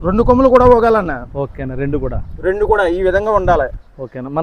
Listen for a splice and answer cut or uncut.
uncut